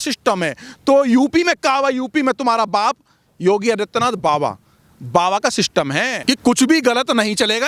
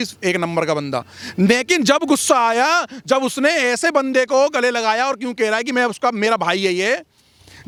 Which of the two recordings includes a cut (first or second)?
first